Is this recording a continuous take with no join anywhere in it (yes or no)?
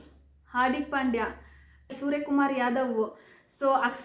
no